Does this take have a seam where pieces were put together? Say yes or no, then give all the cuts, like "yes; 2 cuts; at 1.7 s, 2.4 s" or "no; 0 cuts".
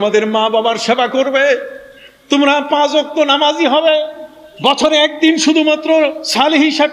no; 0 cuts